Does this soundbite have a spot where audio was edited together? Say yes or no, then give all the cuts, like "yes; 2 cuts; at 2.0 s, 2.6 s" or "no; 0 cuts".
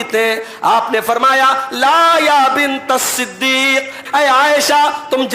yes; 1 cut; at 4.0 s